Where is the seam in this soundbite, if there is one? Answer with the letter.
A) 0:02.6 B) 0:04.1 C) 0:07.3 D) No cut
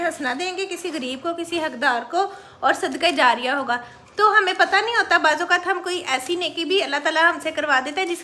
D